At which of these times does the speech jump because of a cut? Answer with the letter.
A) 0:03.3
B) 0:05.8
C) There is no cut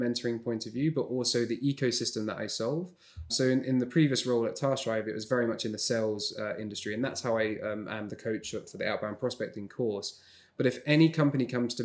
A